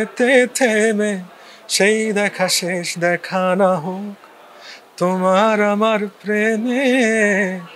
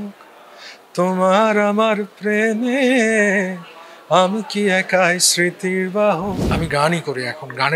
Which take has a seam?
second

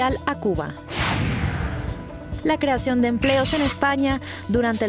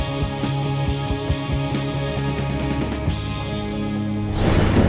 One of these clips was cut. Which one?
second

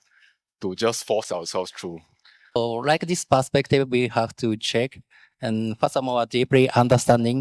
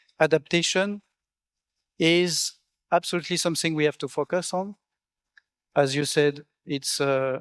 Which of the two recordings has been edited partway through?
first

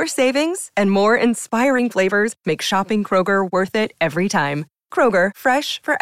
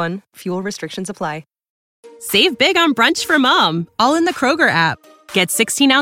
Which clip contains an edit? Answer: second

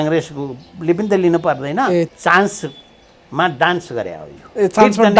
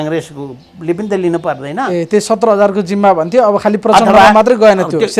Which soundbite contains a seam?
first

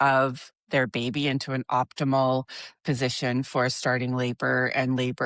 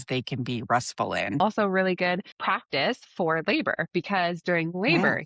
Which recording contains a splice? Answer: second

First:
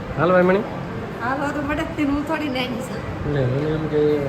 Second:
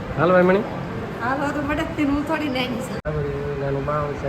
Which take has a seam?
second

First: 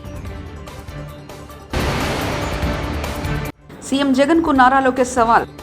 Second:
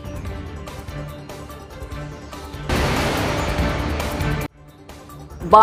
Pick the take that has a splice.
first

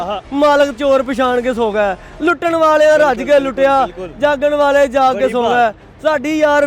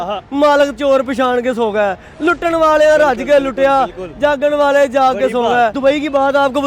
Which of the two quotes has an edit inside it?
second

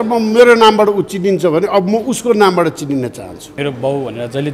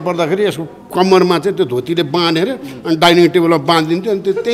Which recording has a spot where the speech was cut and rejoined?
first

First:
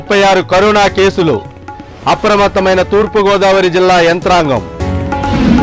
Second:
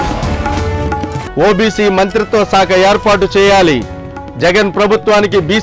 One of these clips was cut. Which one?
second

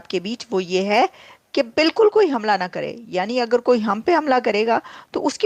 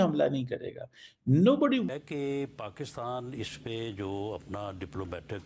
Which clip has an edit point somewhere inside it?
second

